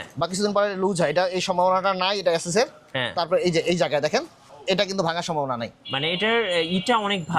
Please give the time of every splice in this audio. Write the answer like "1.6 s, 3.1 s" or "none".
none